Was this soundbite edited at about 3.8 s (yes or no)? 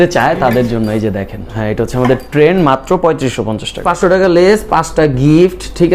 yes